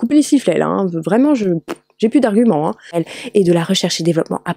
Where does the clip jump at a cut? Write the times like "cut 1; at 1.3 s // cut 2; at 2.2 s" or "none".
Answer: cut 1; at 2.9 s